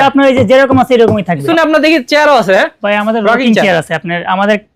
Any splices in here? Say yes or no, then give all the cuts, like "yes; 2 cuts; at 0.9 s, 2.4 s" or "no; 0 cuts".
yes; 1 cut; at 1.4 s